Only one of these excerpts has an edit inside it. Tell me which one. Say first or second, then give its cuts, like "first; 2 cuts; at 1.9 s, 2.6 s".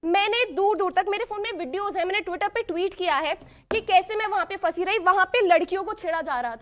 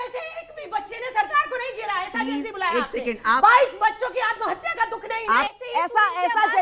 second; 1 cut; at 5.5 s